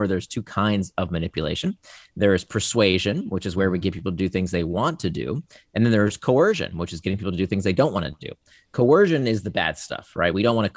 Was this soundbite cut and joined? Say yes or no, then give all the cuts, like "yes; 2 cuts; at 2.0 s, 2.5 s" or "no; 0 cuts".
no; 0 cuts